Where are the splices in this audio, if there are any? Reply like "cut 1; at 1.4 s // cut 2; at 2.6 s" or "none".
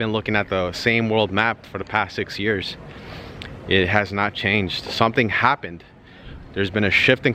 none